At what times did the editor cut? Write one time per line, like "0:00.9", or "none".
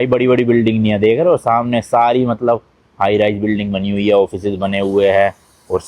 none